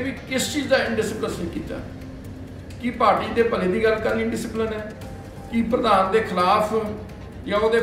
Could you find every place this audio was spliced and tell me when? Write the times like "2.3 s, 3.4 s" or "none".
none